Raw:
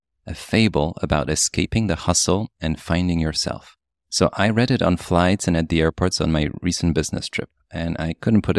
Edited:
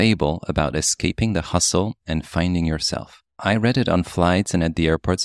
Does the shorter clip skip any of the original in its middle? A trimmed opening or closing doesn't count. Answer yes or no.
yes